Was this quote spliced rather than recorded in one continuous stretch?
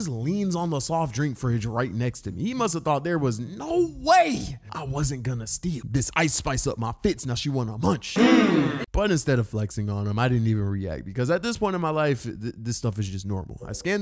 no; 0 cuts

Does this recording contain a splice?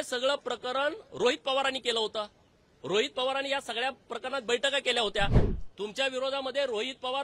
yes; 1 cut; at 5.5 s

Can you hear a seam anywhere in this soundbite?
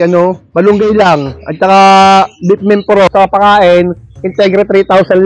yes; 1 cut; at 3.1 s

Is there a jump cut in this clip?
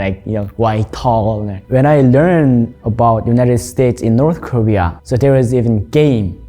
yes; 2 cuts; at 1.6 s, 5.0 s

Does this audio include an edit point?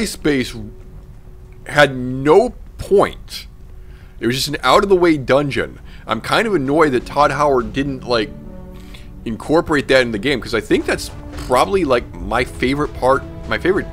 no; 0 cuts

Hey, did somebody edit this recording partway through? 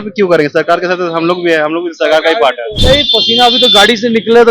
yes; 1 cut; at 2.7 s

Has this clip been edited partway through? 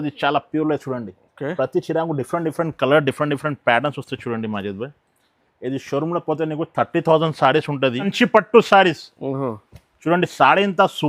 yes; 1 cut; at 8.1 s

